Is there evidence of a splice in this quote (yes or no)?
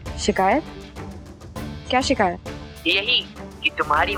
no